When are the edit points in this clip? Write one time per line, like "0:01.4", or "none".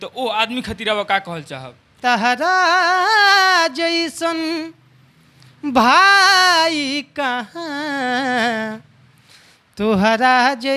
0:01.9